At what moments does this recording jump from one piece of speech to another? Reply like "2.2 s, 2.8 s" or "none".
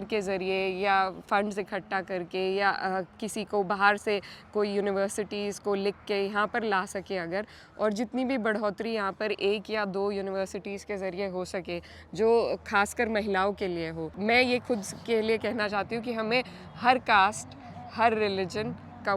14.1 s